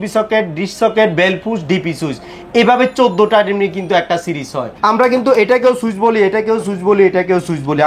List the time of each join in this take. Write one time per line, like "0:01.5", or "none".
0:04.7